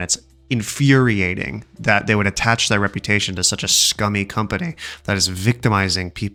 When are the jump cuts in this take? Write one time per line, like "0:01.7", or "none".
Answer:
none